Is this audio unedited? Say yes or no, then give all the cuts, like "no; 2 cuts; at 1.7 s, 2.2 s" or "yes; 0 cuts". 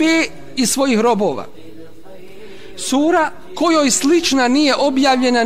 no; 1 cut; at 3.5 s